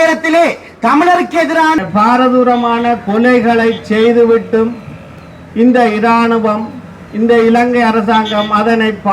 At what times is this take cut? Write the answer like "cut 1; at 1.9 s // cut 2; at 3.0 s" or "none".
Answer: cut 1; at 1.8 s